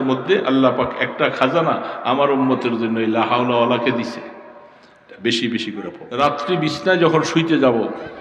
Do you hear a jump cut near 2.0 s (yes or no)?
no